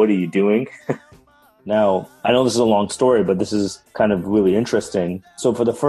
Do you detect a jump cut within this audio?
yes; 1 cut; at 1.3 s

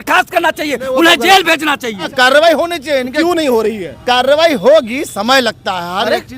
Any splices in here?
yes; 1 cut; at 2.1 s

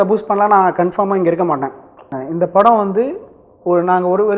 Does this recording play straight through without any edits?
no; 1 cut; at 2.2 s

